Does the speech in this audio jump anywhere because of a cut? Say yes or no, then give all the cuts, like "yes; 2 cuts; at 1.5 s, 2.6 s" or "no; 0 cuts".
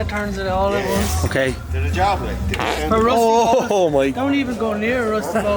no; 0 cuts